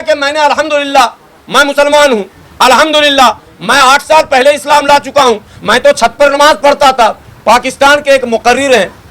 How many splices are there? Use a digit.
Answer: 1